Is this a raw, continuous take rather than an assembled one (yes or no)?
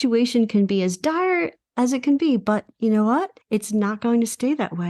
no